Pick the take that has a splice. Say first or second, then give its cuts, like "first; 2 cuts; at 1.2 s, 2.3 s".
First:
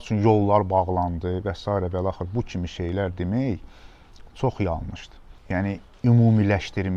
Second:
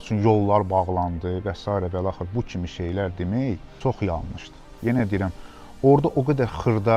second; 2 cuts; at 3.7 s, 4.7 s